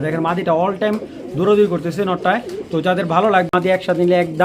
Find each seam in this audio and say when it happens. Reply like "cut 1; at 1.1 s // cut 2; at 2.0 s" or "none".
cut 1; at 3.5 s